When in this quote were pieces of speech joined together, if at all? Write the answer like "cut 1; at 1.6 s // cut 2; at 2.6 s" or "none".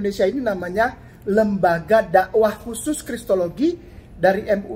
none